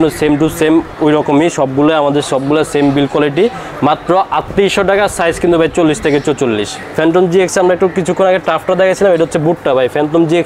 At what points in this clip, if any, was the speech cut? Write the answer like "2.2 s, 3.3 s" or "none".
6.8 s